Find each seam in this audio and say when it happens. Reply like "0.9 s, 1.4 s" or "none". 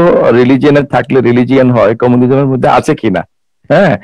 none